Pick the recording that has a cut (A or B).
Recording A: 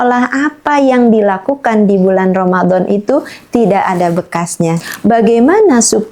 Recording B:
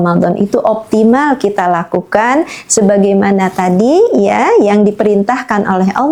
A